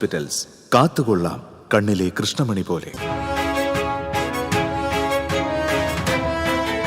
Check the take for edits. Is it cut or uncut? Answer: cut